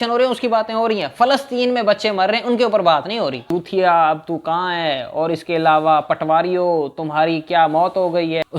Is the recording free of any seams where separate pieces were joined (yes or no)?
no